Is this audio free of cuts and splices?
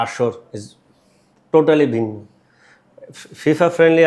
yes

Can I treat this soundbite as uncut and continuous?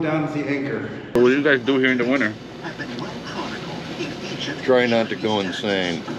no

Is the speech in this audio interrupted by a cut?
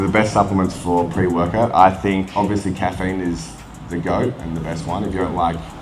yes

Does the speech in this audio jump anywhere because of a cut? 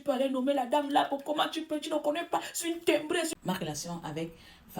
yes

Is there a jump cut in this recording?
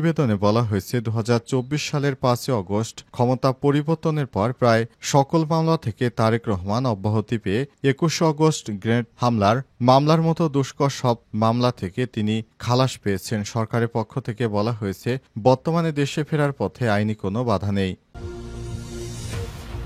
yes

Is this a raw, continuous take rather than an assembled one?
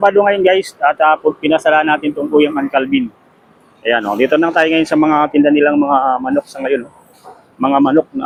yes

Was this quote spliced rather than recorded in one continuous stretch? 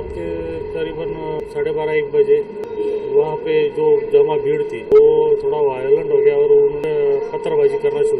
yes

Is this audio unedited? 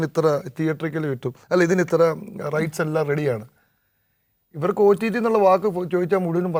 yes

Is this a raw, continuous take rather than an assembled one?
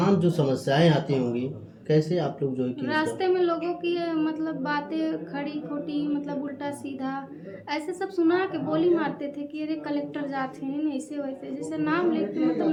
yes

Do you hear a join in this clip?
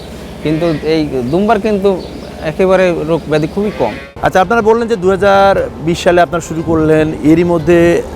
yes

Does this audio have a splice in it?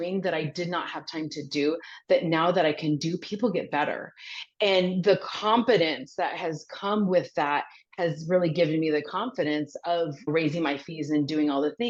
no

